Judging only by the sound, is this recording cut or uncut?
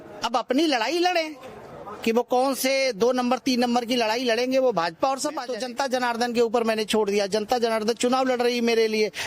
cut